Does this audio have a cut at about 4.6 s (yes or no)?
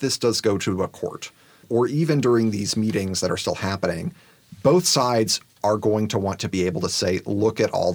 no